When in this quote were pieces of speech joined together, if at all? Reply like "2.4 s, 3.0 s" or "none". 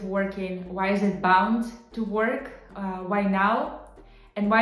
none